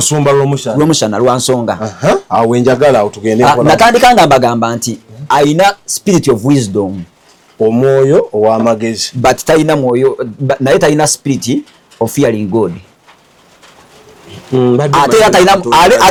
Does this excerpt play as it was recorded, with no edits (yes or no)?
yes